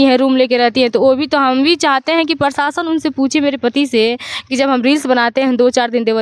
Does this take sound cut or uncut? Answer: uncut